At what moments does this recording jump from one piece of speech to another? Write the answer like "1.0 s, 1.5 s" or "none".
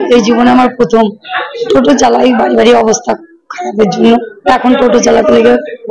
1.6 s